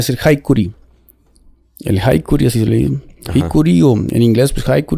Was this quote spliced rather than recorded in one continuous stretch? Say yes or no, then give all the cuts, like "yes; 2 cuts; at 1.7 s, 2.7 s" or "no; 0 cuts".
no; 0 cuts